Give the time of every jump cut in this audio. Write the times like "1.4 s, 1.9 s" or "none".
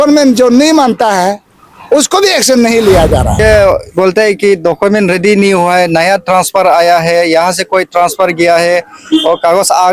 3.4 s

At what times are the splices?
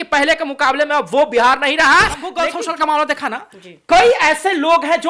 2.4 s

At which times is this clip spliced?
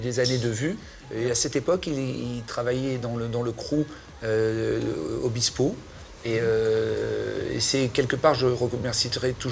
none

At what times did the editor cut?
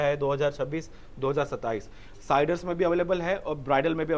none

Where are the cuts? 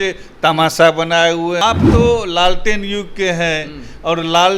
1.6 s

